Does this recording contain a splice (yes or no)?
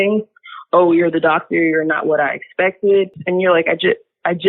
yes